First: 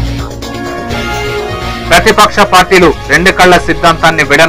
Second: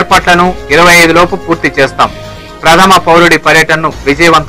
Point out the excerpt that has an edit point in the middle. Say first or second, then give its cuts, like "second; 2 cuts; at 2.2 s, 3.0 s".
first; 1 cut; at 1.5 s